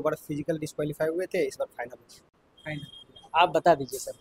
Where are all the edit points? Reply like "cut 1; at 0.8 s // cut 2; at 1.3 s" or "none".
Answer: none